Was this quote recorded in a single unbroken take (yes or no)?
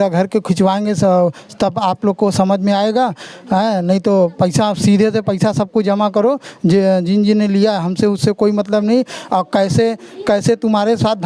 yes